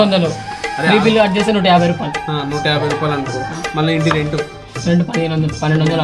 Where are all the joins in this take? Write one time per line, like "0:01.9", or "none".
none